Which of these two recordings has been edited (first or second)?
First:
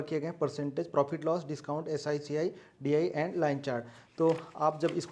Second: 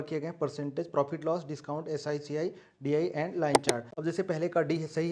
second